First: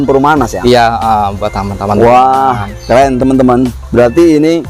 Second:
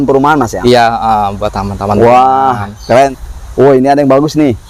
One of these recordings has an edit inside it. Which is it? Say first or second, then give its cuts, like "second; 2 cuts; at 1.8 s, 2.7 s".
second; 1 cut; at 3.1 s